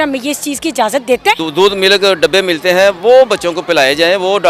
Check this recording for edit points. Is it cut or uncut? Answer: cut